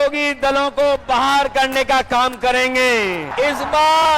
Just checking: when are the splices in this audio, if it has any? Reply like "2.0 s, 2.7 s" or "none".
3.3 s